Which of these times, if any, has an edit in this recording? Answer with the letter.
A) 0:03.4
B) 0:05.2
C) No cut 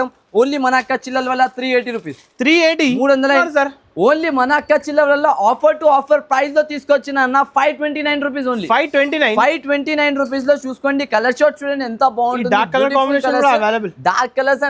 A